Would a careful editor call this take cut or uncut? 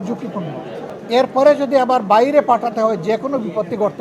cut